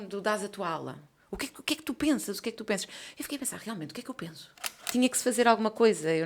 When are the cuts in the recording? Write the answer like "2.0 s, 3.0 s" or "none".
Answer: 4.9 s